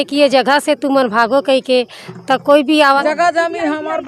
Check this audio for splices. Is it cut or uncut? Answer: cut